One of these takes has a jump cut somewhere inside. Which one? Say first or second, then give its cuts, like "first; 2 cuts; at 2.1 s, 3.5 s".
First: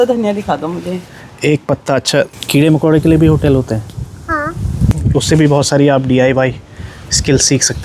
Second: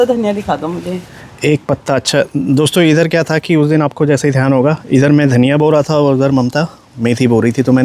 first; 2 cuts; at 2.3 s, 4.9 s